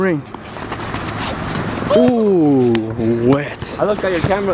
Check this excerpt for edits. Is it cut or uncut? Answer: uncut